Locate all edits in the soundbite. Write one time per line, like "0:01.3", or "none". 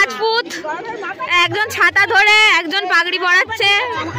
none